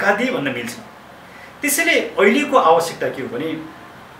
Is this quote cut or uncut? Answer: uncut